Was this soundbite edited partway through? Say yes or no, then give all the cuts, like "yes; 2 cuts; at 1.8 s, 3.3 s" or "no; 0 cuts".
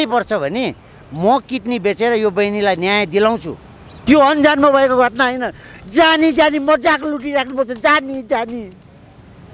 yes; 1 cut; at 3.9 s